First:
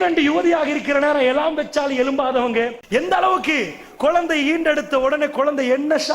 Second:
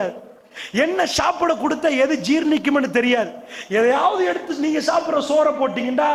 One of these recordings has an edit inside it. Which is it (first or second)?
first